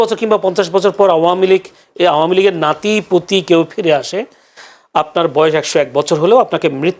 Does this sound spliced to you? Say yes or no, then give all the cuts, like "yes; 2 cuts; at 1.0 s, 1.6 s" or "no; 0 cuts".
no; 0 cuts